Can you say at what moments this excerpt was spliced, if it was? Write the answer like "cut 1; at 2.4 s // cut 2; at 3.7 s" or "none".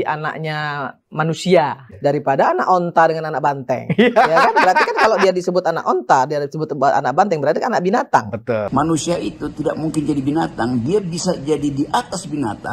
cut 1; at 1.8 s // cut 2; at 8.7 s